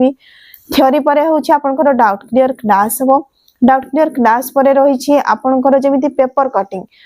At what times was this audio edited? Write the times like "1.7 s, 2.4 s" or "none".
none